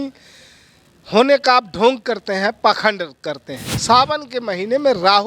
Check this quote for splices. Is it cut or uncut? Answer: cut